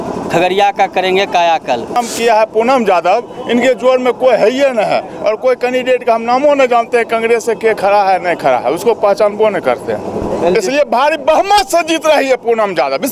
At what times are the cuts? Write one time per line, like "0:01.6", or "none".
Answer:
0:02.0